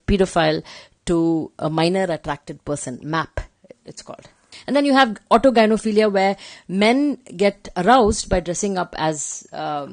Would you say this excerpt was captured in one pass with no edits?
no; 1 cut; at 4.5 s

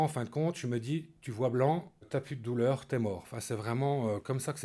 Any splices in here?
yes; 1 cut; at 2.1 s

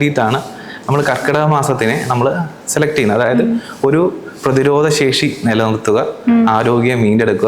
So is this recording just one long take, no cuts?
yes; 0 cuts

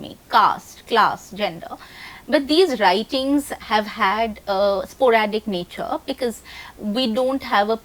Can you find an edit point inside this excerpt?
no; 0 cuts

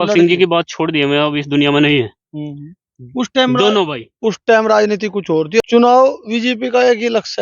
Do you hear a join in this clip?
yes; 1 cut; at 5.6 s

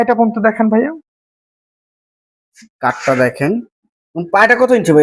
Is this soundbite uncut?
yes; 0 cuts

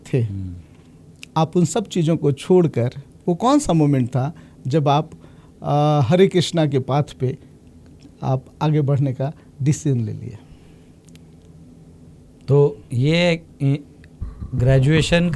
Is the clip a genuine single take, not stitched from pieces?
yes; 0 cuts

